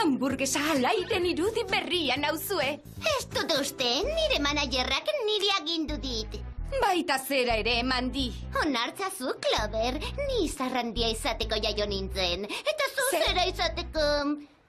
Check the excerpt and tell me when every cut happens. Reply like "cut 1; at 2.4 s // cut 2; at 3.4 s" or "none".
cut 1; at 8.6 s